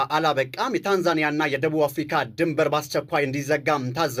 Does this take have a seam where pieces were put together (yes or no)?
no